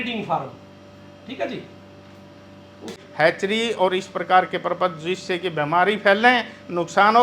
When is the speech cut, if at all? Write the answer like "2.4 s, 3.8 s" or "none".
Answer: 3.0 s